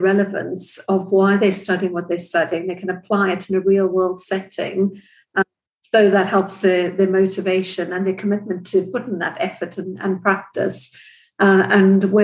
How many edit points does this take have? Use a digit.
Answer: 0